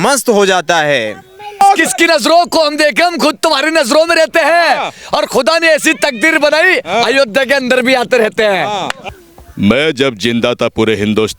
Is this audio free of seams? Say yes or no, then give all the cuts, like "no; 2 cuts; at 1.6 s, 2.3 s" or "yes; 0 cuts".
no; 2 cuts; at 1.6 s, 9.0 s